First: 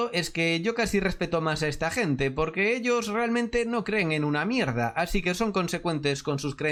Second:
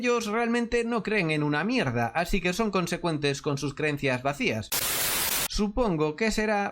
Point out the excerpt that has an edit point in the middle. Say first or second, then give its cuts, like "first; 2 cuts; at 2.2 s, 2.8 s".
second; 1 cut; at 5.0 s